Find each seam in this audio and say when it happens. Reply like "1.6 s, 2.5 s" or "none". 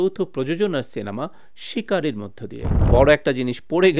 2.6 s